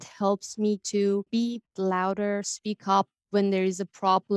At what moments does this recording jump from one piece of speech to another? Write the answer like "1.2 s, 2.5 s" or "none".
none